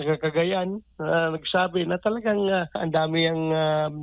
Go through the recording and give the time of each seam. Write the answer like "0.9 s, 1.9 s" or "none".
2.8 s